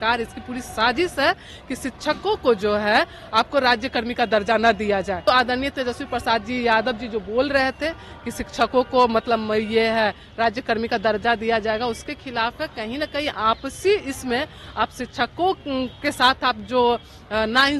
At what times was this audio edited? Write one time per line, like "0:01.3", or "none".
0:05.2